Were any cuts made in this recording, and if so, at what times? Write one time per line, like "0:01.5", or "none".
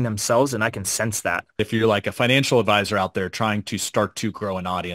0:01.6